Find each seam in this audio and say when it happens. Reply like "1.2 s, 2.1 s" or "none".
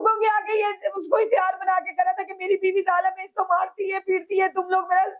none